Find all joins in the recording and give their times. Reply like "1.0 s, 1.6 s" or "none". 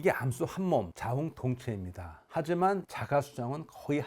0.9 s